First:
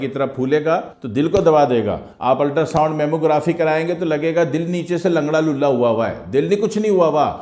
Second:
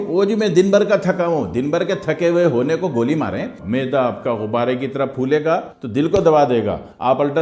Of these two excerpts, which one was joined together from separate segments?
second; 1 cut; at 3.5 s

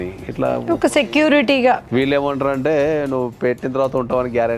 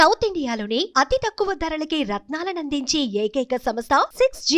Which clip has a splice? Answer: first; 1 cut; at 1.8 s

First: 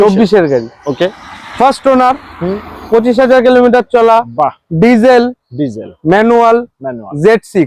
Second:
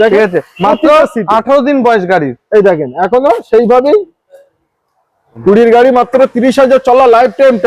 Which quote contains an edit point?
second; 1 cut; at 5.3 s

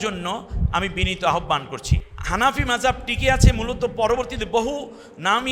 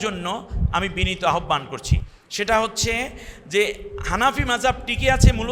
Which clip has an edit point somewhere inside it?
first; 1 cut; at 2.1 s

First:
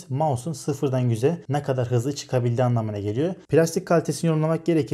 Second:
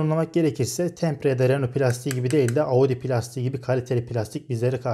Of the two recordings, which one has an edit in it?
first; 2 cuts; at 1.4 s, 3.4 s

